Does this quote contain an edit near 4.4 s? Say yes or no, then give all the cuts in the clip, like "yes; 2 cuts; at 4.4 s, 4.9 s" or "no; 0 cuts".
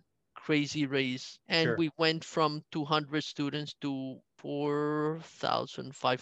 yes; 2 cuts; at 1.3 s, 4.4 s